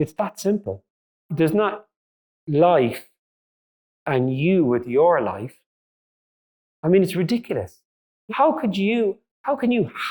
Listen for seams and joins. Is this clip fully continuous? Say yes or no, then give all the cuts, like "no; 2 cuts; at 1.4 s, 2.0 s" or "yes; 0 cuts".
no; 2 cuts; at 1.2 s, 8.1 s